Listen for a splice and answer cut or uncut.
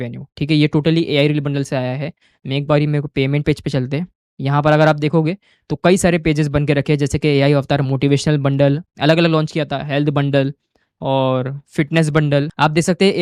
uncut